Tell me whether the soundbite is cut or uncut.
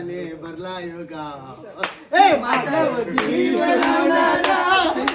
uncut